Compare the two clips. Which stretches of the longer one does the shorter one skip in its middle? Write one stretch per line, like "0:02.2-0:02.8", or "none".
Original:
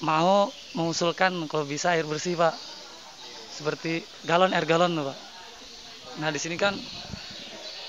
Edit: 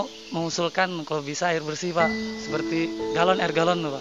0:02.7-0:03.4